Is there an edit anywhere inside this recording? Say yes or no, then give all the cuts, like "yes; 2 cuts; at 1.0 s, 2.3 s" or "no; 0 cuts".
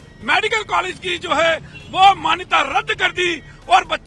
no; 0 cuts